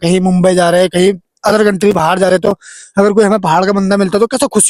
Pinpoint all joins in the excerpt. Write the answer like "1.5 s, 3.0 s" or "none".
none